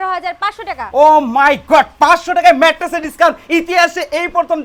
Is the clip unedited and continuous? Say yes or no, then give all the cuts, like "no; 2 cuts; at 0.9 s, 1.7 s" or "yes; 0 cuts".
yes; 0 cuts